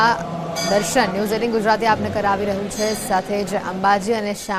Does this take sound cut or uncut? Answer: uncut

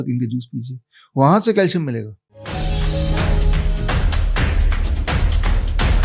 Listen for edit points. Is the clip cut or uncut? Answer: cut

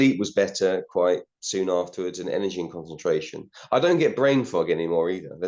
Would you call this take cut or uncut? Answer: uncut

